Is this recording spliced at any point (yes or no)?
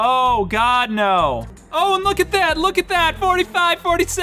yes